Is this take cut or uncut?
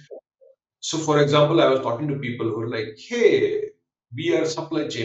uncut